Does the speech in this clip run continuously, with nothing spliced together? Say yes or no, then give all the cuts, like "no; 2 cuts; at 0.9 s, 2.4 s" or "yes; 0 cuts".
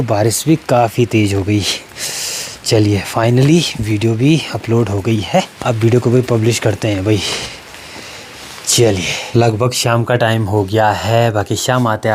yes; 0 cuts